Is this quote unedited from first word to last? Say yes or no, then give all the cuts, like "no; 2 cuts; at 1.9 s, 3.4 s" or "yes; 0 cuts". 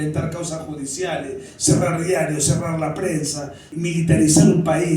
no; 1 cut; at 3.6 s